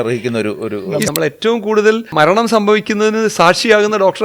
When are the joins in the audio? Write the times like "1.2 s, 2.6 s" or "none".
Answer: 1.0 s, 2.1 s

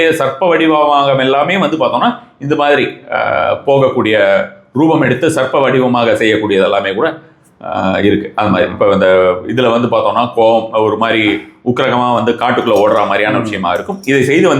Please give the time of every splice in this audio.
none

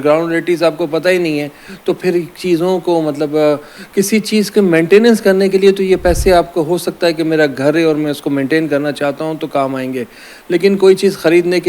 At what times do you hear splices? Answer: none

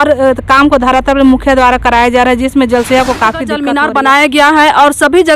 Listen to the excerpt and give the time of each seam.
3.6 s

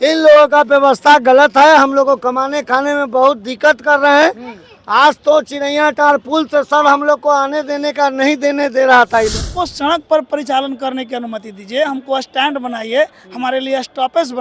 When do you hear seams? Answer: 9.3 s

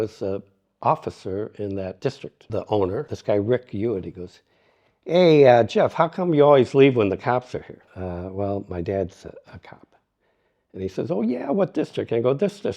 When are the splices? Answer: 2.4 s, 3.1 s, 7.8 s

